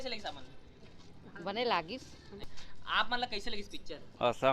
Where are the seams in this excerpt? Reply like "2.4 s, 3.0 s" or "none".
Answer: 2.4 s